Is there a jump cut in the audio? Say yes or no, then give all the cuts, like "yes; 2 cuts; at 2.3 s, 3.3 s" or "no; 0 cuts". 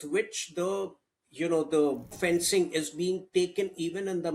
yes; 1 cut; at 2.1 s